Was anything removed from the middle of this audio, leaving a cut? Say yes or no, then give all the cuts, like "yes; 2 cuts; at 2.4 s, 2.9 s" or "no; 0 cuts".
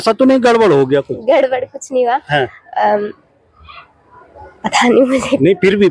no; 0 cuts